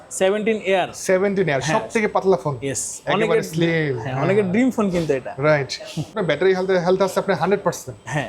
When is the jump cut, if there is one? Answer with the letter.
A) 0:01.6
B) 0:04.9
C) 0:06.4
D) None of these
D